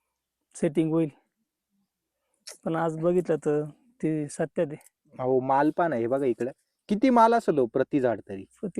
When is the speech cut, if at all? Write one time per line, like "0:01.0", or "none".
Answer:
none